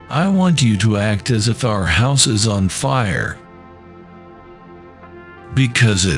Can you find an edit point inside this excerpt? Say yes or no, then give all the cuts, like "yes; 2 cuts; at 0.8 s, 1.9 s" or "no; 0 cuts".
no; 0 cuts